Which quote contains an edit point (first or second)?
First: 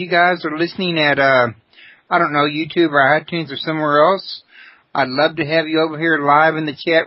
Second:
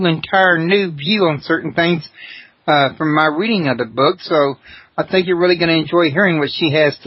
second